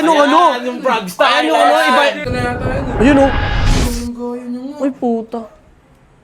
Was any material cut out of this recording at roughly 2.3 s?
yes; 1 cut; at 2.3 s

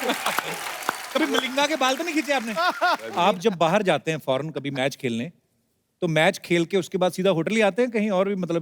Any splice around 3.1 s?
yes; 1 cut; at 3.1 s

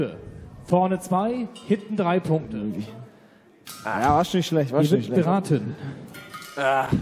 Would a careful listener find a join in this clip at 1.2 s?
no; 1 cut; at 2.5 s

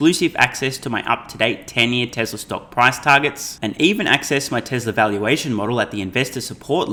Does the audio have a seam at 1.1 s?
no; 0 cuts

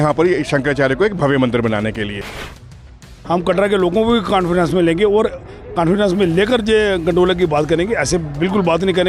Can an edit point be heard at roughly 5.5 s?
no; 1 cut; at 2.9 s

